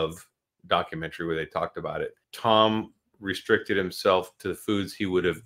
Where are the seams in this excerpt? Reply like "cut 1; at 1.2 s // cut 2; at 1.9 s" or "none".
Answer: cut 1; at 2.2 s